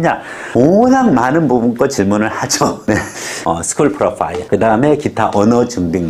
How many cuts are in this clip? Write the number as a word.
one